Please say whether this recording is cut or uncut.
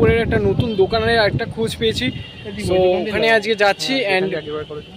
uncut